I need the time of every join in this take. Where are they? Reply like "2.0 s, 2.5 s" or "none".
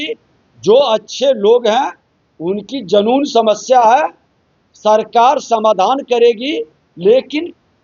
none